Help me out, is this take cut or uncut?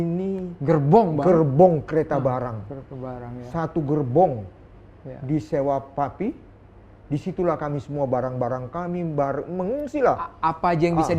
uncut